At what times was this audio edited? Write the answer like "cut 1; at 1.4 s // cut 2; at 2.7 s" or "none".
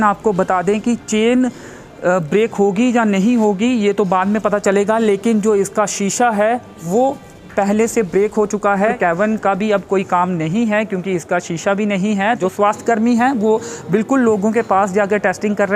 cut 1; at 8.9 s // cut 2; at 12.4 s